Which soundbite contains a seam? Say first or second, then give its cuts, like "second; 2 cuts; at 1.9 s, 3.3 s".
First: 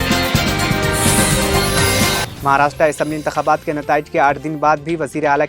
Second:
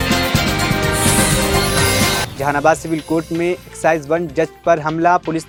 first; 1 cut; at 2.3 s